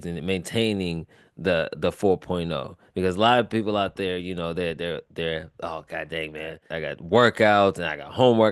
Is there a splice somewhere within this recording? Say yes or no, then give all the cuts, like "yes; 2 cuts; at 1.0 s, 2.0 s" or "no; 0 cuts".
yes; 1 cut; at 6.6 s